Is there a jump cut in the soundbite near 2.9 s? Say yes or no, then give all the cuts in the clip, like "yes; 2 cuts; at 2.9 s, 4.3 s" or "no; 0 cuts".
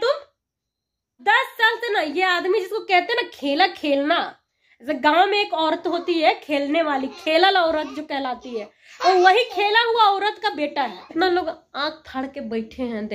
no; 2 cuts; at 1.1 s, 11.0 s